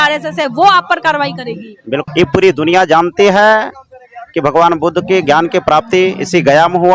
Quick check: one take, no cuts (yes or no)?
no